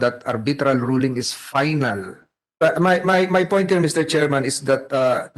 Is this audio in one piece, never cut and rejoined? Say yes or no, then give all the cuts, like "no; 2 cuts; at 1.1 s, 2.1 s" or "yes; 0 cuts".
no; 1 cut; at 2.6 s